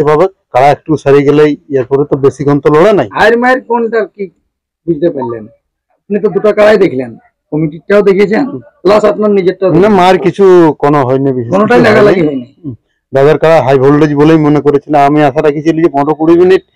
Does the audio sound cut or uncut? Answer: uncut